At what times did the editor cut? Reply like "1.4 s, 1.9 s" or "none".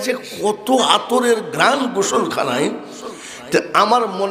none